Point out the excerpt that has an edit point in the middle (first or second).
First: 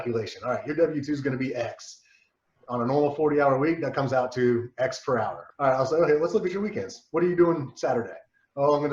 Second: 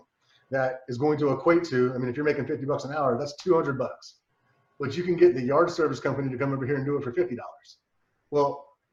first